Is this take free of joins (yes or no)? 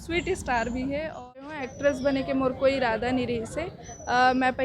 no